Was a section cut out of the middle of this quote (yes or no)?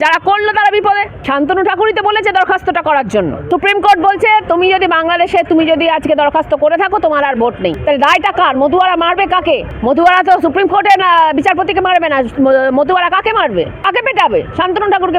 yes